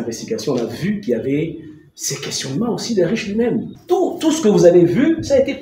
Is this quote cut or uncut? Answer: cut